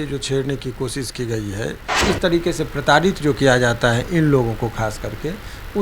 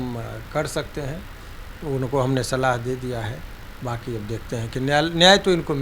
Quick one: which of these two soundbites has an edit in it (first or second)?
first